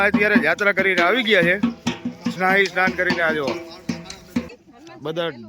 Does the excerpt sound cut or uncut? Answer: cut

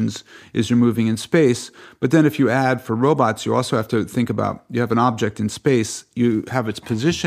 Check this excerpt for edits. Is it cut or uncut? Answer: uncut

